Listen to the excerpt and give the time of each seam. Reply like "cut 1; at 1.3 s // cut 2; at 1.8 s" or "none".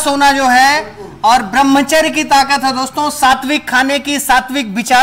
none